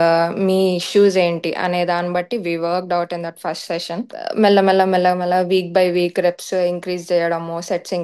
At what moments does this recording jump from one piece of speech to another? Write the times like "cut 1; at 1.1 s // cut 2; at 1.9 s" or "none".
cut 1; at 4.1 s